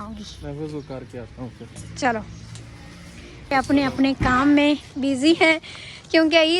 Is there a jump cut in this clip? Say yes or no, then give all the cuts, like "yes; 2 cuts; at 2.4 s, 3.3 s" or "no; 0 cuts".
yes; 1 cut; at 3.5 s